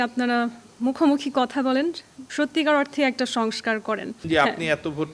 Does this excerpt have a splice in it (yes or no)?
yes